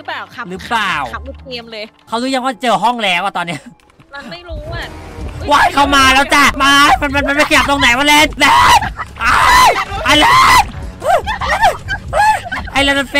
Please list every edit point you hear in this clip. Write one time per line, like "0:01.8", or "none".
none